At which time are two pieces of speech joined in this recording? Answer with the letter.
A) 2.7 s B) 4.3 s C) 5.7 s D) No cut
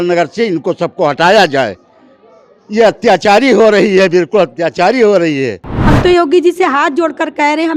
C